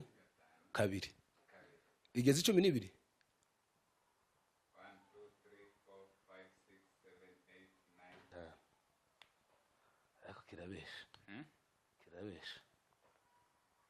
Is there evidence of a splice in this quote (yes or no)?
yes